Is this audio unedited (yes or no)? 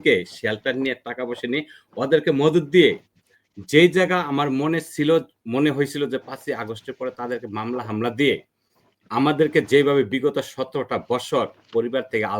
yes